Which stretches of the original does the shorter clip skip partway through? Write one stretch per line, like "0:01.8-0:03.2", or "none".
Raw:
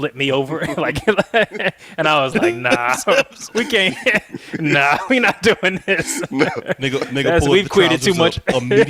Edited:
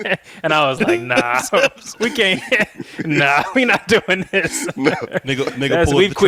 none